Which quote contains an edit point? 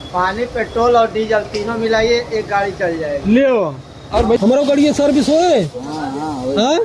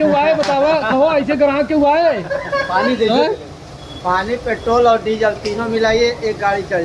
first; 1 cut; at 4.4 s

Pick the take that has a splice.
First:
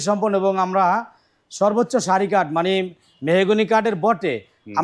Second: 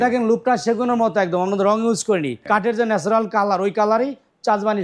second; 1 cut; at 2.3 s

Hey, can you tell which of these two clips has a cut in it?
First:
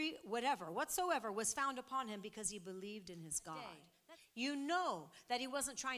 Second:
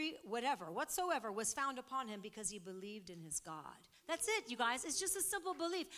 first; 1 cut; at 3.9 s

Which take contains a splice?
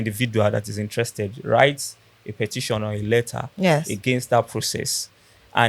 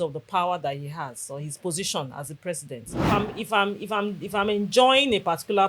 second; 1 cut; at 3.0 s

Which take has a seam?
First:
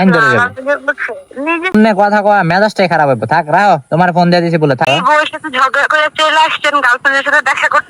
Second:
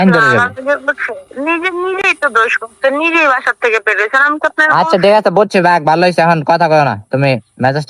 first; 2 cuts; at 1.7 s, 4.9 s

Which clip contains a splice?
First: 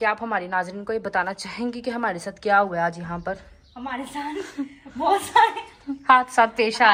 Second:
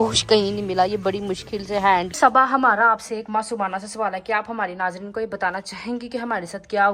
second; 2 cuts; at 0.9 s, 2.1 s

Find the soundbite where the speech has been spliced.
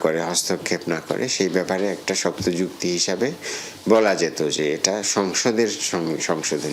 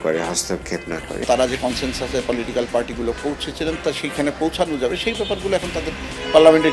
second; 1 cut; at 1.2 s

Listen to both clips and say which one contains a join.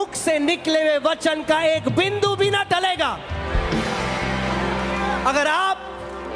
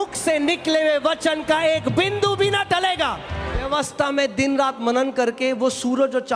second; 1 cut; at 3.7 s

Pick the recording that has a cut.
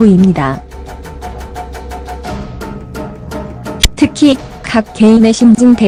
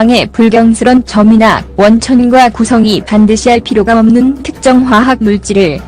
second; 1 cut; at 3.9 s

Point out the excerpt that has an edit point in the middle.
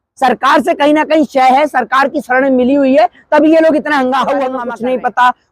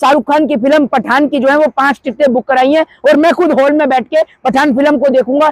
first; 1 cut; at 4.6 s

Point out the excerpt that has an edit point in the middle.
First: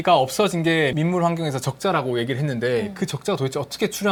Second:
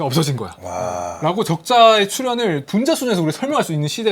second; 1 cut; at 1.1 s

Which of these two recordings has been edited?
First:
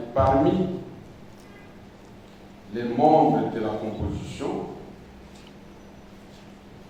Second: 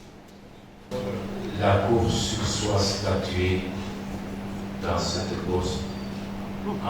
second; 1 cut; at 0.9 s

